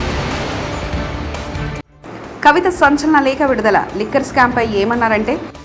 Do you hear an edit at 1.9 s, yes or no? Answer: yes